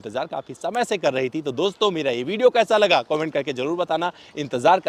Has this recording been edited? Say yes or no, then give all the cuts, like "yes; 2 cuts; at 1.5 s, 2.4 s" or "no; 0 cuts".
no; 0 cuts